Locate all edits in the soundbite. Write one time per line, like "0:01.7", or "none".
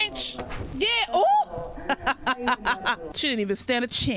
0:03.1